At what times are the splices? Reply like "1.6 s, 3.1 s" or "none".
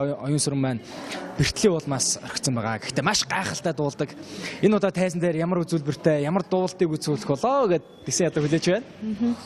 4.3 s